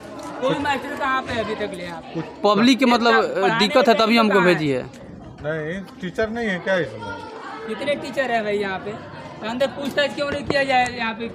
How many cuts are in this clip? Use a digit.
0